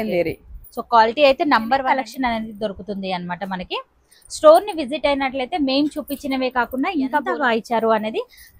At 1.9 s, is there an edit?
yes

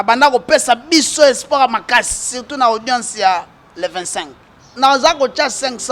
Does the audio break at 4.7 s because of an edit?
yes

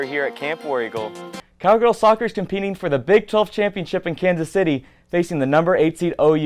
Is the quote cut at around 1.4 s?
yes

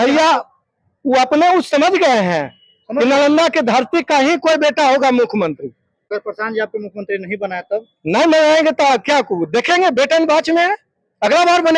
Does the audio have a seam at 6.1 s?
yes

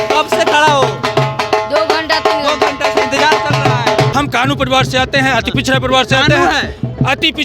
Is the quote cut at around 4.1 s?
yes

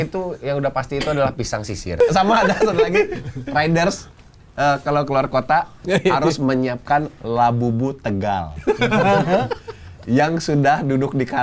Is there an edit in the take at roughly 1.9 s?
yes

